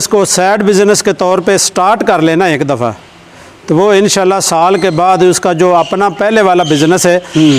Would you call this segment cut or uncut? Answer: uncut